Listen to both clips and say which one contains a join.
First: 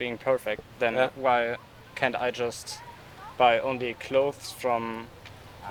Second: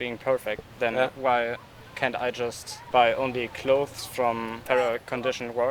second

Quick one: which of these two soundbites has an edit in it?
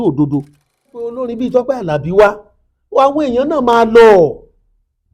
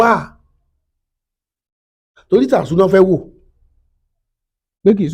first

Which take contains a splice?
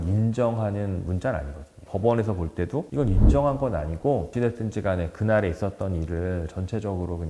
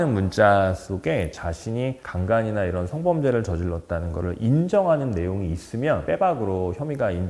first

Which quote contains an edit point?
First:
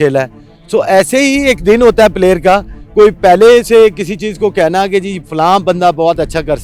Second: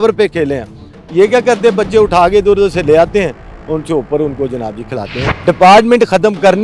second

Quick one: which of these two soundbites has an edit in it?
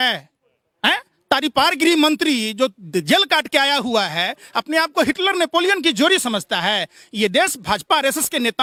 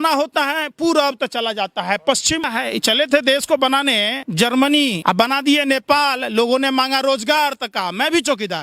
second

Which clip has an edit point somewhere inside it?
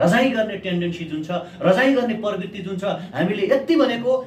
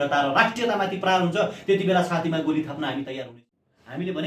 second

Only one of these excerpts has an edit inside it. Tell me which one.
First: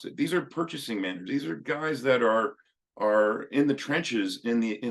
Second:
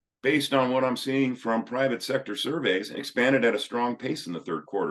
second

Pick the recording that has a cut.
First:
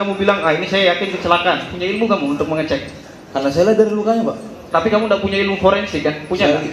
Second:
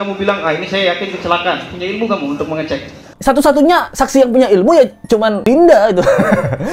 second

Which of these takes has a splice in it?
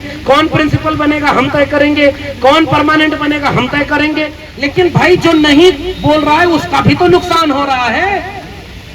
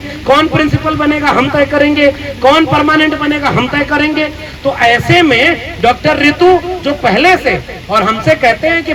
first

